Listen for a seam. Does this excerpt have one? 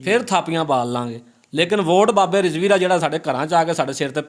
no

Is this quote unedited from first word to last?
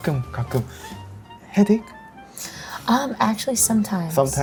yes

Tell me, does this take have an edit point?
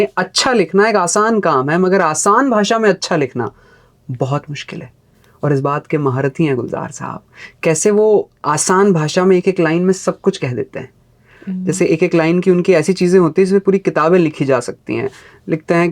no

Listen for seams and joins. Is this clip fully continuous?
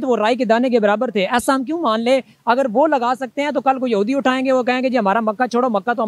yes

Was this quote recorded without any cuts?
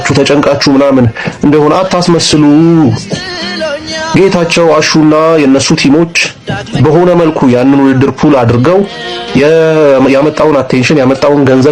yes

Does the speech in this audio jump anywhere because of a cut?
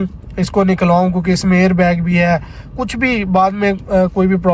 no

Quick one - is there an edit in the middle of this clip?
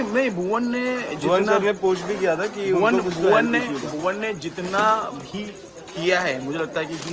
no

